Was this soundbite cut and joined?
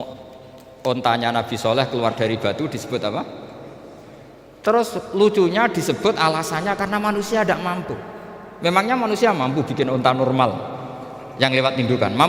no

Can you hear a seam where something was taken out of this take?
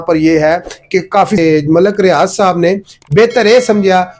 yes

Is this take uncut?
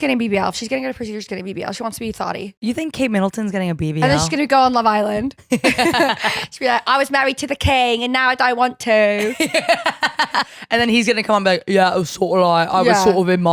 no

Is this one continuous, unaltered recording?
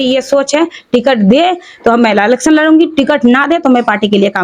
yes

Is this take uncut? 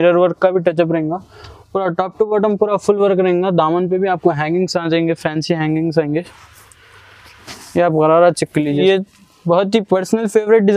no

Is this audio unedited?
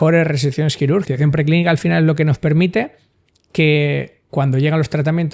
no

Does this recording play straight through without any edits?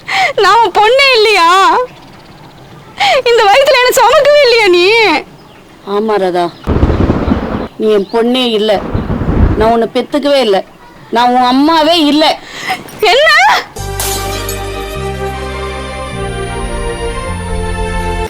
yes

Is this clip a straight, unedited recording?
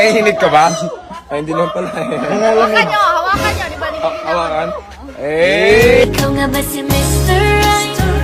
yes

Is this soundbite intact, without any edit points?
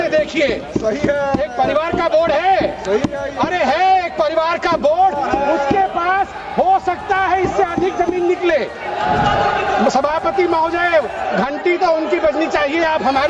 yes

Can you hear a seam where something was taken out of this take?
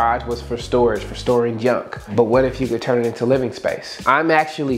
yes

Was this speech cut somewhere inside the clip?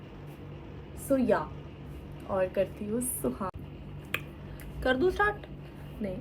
yes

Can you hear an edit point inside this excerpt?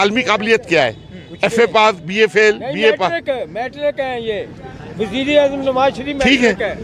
no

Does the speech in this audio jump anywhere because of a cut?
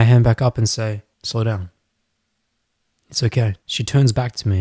yes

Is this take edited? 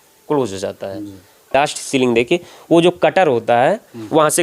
yes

